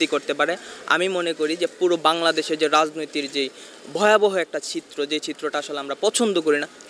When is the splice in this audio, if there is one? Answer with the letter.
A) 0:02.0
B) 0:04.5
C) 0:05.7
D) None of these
D